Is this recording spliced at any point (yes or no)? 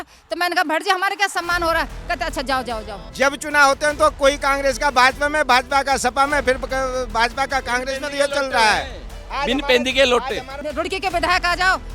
yes